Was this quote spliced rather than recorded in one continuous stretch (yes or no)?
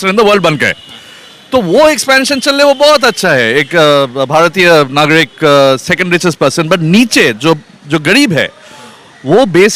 no